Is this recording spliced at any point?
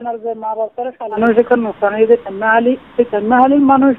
yes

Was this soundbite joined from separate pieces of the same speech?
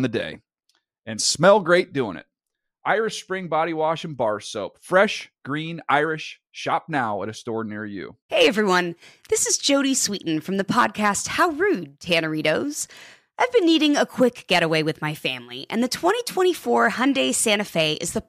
yes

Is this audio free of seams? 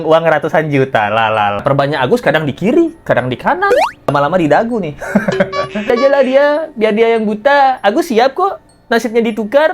no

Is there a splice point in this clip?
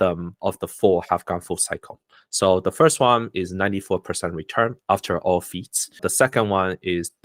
yes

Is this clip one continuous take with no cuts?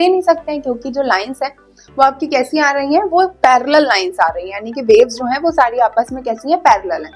yes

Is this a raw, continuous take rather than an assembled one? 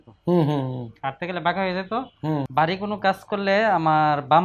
no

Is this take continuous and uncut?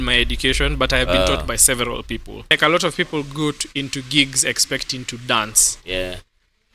no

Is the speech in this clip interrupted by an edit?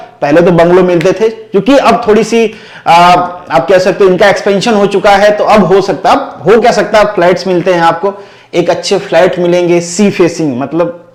no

